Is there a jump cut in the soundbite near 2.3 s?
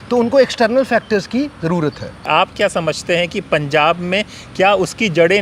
yes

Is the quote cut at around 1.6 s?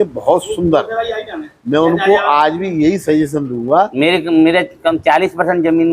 no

